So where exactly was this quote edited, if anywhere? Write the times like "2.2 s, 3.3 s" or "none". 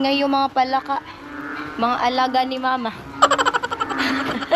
none